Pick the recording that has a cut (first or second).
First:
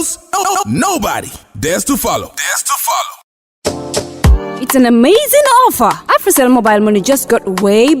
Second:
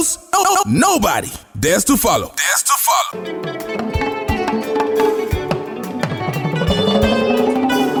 first